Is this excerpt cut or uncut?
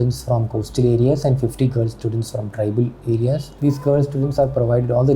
cut